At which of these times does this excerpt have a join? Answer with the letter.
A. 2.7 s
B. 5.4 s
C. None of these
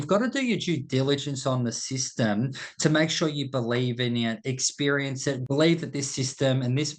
B